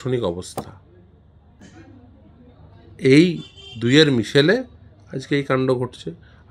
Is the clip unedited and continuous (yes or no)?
yes